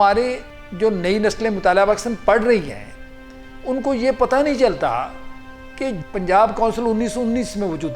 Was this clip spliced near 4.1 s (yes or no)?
no